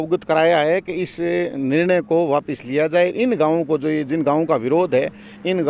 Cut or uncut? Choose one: uncut